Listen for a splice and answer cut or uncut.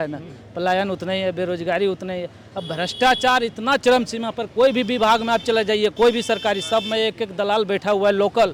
uncut